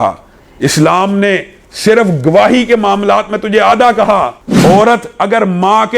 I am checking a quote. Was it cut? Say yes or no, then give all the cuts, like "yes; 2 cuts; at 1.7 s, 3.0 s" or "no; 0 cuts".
yes; 1 cut; at 4.4 s